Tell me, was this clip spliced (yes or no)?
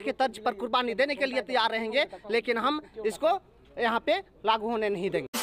no